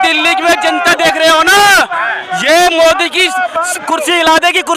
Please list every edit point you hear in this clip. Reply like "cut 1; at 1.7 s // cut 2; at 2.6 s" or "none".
none